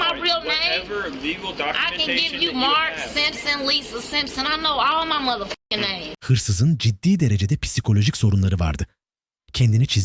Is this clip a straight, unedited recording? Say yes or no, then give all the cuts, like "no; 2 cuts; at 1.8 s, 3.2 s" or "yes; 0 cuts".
yes; 0 cuts